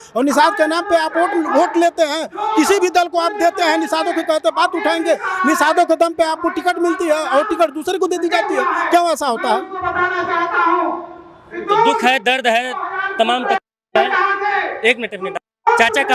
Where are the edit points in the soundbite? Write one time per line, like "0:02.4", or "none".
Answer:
none